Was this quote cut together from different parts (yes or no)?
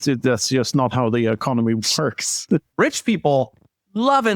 yes